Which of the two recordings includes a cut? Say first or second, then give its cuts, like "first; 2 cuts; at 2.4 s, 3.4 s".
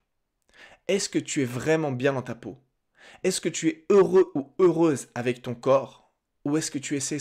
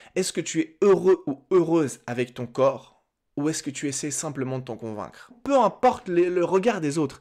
second; 1 cut; at 5.4 s